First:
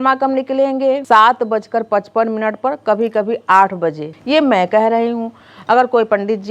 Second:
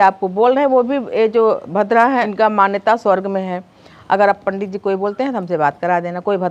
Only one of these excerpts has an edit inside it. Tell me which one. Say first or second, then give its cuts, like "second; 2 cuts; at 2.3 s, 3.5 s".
first; 2 cuts; at 1.0 s, 4.1 s